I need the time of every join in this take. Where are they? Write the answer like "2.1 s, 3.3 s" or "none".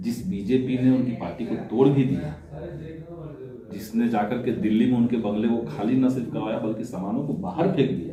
none